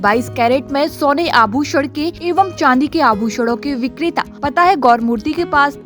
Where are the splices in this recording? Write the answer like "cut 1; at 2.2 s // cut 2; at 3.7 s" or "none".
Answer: cut 1; at 2.2 s // cut 2; at 4.3 s